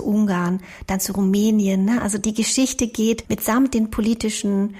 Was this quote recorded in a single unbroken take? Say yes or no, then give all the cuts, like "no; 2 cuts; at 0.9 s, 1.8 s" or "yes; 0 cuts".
no; 2 cuts; at 2.2 s, 3.2 s